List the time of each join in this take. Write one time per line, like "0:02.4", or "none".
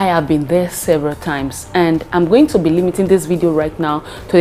none